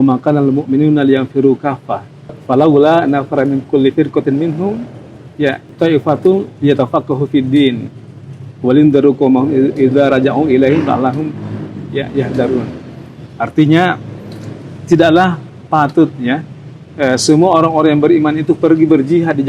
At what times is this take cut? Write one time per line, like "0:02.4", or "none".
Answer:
0:02.4
0:05.7